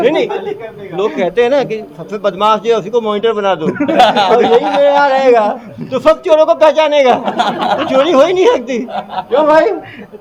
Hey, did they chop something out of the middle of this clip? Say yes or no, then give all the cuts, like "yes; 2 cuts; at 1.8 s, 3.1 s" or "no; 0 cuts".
no; 0 cuts